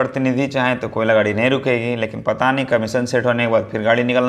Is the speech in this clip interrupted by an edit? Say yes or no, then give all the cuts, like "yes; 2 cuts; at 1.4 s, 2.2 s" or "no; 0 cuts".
no; 0 cuts